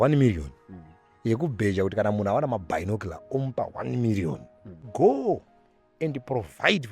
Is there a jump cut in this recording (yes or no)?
yes